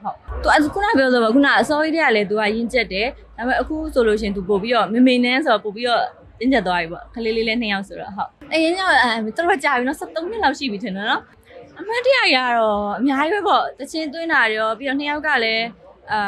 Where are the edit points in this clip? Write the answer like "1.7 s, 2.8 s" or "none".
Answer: 8.3 s, 11.4 s